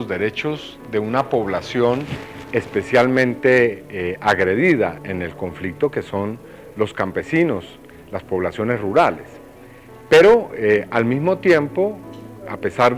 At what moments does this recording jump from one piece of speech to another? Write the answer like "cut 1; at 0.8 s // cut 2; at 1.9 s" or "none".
cut 1; at 6.7 s